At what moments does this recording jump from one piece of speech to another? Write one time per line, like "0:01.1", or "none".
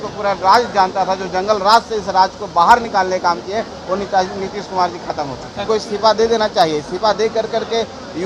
0:05.6